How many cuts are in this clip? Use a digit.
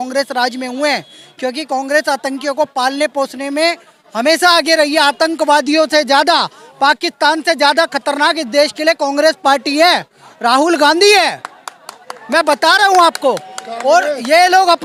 0